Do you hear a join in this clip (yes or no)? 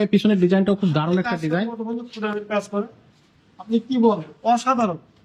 no